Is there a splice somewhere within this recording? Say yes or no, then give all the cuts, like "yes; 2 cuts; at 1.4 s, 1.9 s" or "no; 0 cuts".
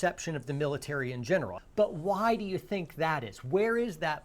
yes; 1 cut; at 1.6 s